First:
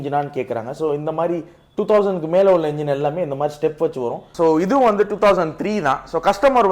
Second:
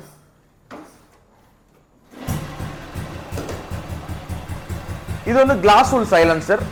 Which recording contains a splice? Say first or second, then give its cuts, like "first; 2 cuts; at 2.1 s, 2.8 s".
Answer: first; 1 cut; at 4.3 s